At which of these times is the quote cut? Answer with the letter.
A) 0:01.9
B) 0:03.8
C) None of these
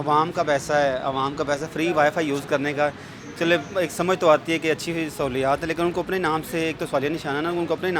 C